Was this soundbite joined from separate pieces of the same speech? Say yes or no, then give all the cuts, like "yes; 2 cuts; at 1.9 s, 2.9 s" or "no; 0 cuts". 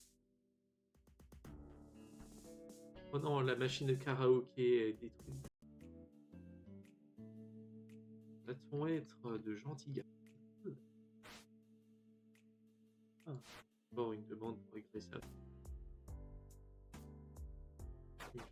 no; 0 cuts